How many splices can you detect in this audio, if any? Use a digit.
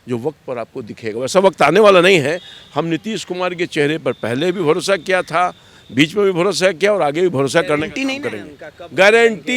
0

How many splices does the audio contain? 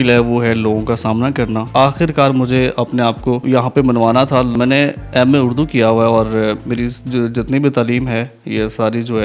3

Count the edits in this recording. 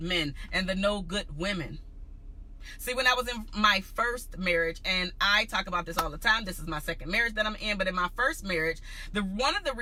0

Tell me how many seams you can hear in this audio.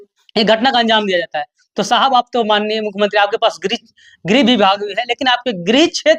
0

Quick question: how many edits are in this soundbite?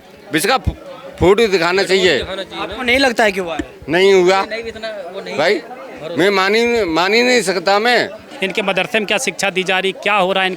1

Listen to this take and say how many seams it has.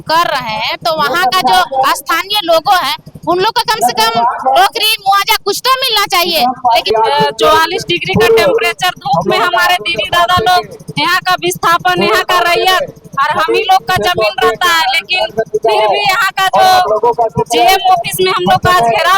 1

